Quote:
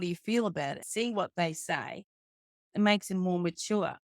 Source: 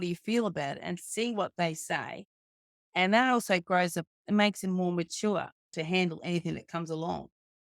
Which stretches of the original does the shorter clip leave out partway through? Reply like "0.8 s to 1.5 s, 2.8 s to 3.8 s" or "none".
0.8 s to 1.0 s, 2.8 s to 4.1 s